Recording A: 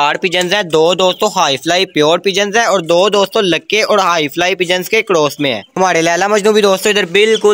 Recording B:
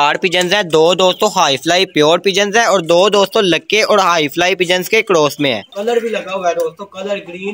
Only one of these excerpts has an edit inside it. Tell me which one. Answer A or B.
B